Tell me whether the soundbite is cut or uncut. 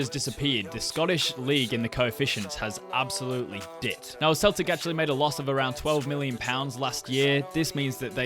cut